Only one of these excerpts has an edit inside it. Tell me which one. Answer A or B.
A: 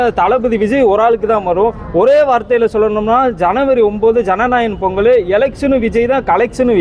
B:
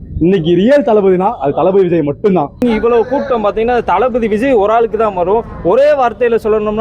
B